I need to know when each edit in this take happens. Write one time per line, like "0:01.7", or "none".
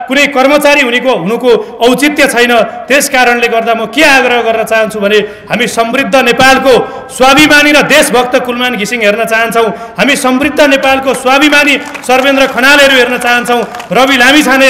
none